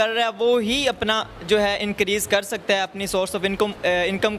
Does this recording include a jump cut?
no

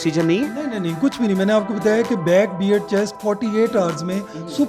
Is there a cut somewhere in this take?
no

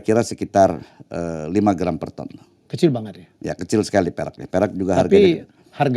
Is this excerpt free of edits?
yes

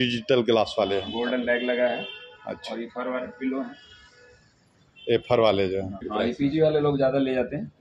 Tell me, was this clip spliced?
yes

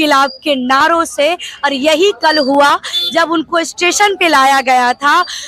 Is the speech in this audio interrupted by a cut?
no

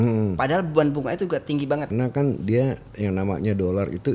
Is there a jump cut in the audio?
yes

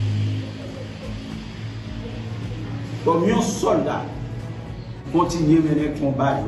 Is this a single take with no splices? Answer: no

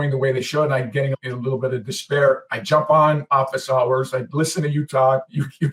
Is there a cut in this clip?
no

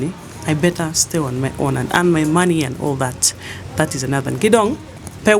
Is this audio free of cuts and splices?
yes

